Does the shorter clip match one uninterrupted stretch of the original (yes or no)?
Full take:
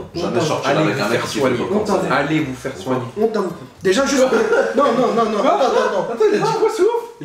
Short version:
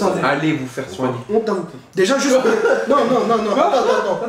yes